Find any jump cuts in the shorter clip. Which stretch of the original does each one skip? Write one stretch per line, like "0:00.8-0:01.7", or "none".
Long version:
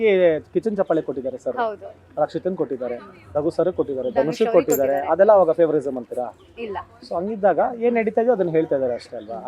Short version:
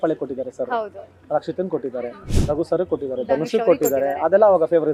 none